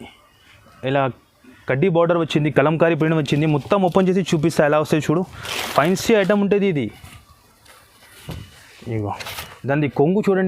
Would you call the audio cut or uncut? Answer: uncut